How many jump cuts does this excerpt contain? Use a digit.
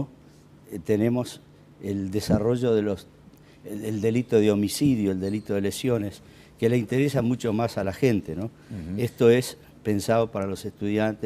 1